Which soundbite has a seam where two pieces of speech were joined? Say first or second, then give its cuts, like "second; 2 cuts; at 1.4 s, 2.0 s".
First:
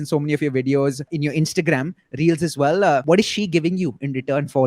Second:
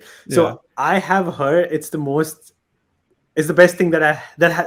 first; 2 cuts; at 1.1 s, 3.0 s